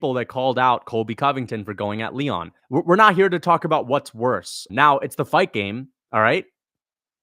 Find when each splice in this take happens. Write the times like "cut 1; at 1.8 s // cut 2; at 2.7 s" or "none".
cut 1; at 2.5 s // cut 2; at 4.6 s // cut 3; at 5.9 s